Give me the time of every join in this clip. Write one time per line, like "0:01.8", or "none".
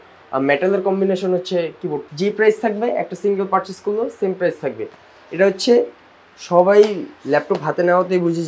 0:02.0